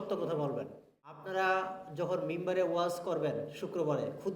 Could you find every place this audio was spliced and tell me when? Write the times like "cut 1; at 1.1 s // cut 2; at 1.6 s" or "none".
cut 1; at 1.2 s